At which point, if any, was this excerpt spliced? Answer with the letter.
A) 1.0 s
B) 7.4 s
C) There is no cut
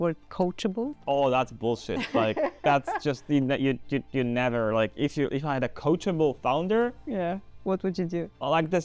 A